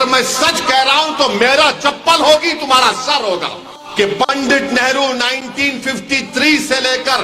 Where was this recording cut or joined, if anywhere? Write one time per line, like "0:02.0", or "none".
0:03.8